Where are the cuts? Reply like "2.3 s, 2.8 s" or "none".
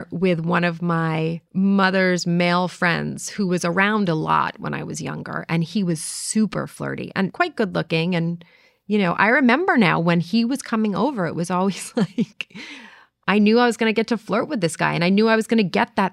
1.4 s, 7.3 s